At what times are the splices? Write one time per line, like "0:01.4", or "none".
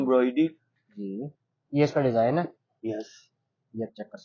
none

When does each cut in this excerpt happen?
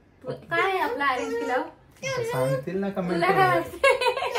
none

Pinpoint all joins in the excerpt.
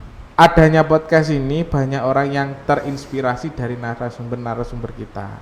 none

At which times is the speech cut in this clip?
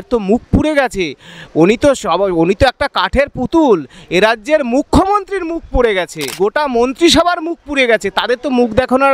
0:06.3

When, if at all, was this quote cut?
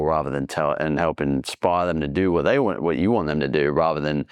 none

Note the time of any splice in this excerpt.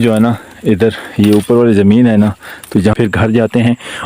0:02.9

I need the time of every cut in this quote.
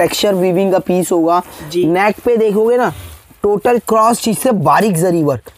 none

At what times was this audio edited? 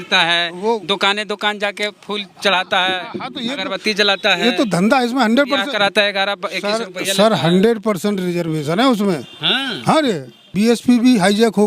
0:10.5

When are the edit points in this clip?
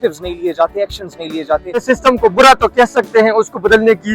0:01.8

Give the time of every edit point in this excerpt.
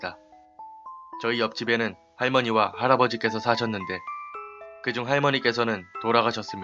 0:04.2

